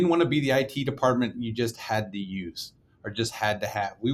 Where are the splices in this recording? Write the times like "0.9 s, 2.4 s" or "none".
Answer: none